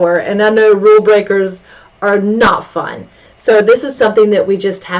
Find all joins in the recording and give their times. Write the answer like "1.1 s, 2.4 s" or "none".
none